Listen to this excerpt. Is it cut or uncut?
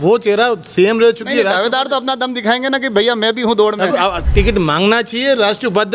cut